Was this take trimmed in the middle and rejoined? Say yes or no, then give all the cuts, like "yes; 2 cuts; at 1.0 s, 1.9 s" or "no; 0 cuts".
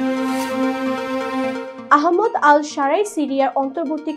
yes; 1 cut; at 1.7 s